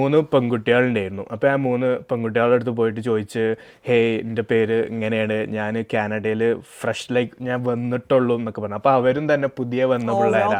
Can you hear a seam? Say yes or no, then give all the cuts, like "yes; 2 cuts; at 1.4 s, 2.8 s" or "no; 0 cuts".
no; 0 cuts